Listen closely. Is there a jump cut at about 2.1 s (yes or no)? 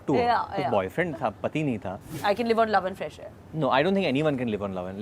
yes